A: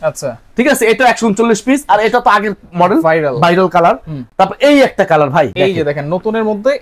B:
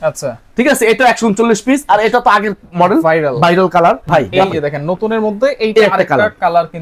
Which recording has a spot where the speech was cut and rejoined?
B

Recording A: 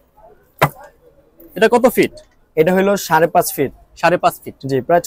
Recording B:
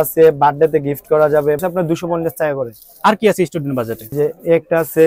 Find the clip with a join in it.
B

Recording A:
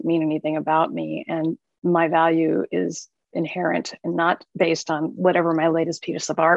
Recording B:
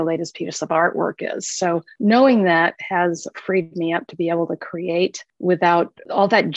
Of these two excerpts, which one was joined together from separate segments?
B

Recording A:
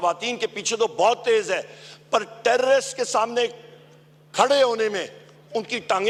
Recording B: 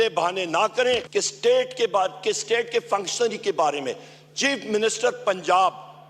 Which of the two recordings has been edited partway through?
B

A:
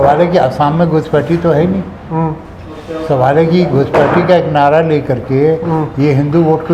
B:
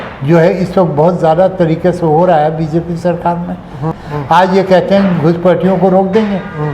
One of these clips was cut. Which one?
B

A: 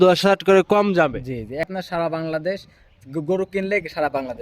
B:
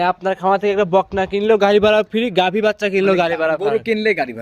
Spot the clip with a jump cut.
A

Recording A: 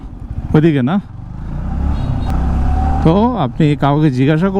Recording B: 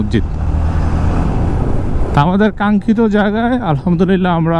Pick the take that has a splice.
A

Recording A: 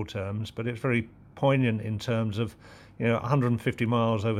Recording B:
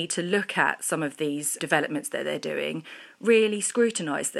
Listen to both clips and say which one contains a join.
B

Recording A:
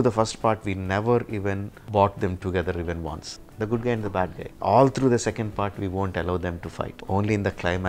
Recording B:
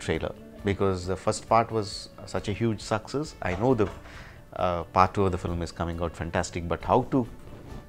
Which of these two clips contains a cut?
A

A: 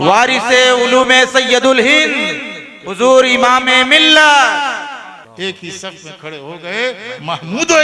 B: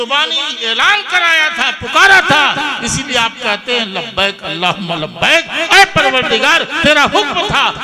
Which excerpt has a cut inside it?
A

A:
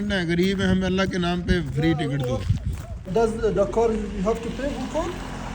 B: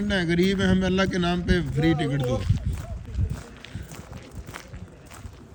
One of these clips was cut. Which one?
A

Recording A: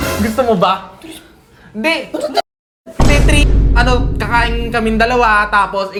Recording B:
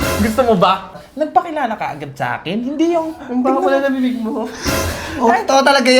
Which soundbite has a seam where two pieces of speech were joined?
B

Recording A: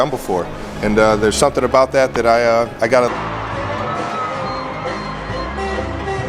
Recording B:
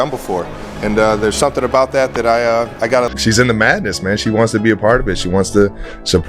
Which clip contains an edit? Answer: A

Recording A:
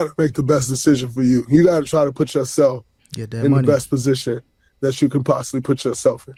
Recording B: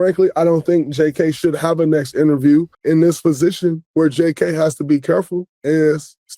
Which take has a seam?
B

